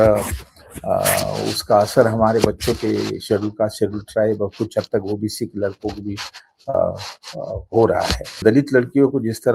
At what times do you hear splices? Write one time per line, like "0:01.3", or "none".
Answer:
0:08.4

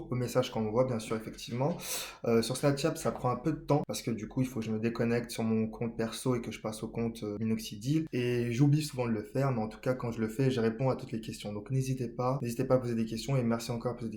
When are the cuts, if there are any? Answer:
0:03.9
0:07.4
0:08.1
0:12.4

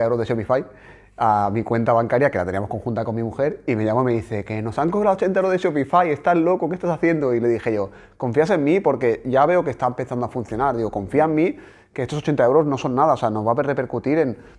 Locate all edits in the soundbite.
none

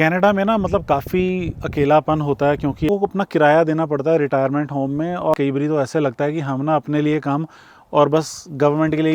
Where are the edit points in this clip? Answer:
0:02.9
0:05.3

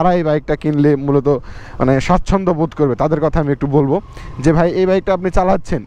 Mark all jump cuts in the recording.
none

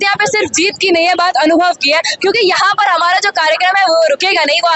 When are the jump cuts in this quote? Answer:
none

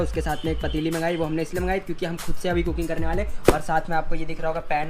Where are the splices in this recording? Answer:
none

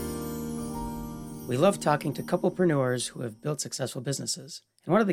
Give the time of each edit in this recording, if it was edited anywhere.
0:01.3

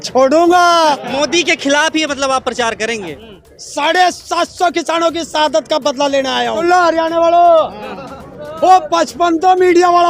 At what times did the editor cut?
0:01.1
0:03.2
0:06.6

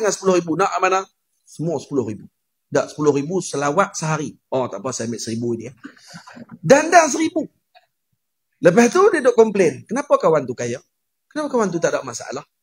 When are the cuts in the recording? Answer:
none

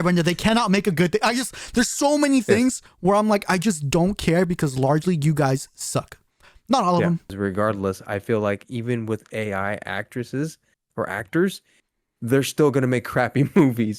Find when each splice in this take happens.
0:07.3

